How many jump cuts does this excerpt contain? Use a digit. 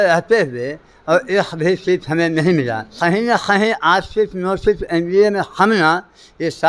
1